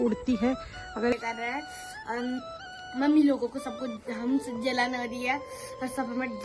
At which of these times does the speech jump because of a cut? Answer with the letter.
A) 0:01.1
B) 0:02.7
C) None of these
A